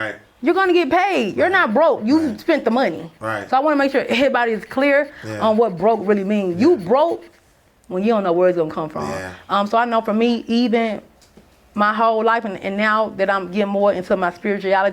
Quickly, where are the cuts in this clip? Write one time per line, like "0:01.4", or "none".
none